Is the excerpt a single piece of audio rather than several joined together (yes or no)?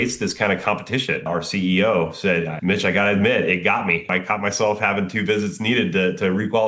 no